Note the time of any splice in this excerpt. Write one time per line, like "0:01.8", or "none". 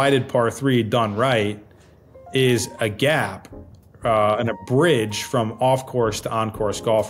none